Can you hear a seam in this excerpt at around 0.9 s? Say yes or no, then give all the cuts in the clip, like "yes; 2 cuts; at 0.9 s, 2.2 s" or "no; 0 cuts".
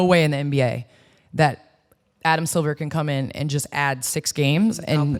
no; 0 cuts